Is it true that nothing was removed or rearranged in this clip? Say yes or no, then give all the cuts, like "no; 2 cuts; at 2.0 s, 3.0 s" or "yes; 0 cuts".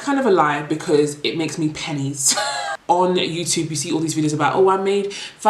no; 1 cut; at 2.7 s